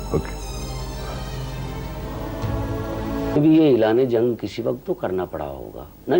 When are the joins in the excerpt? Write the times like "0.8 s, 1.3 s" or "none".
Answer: 3.4 s